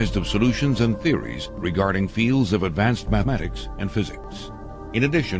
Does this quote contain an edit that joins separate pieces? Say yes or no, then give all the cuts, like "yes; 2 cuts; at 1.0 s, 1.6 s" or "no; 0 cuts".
no; 0 cuts